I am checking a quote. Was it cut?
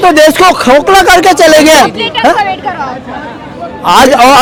no; 0 cuts

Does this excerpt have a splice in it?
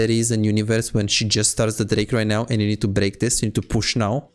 no; 0 cuts

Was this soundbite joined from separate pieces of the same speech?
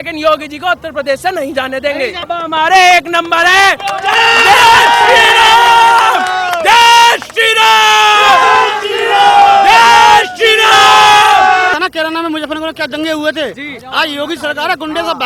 yes; 2 cuts; at 2.3 s, 11.8 s

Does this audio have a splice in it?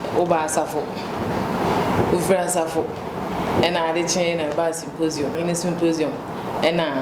yes; 1 cut; at 5.4 s

